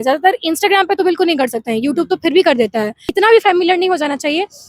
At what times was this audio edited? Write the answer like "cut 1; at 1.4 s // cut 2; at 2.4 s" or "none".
cut 1; at 3.1 s